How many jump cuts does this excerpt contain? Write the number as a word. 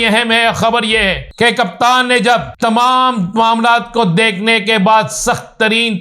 two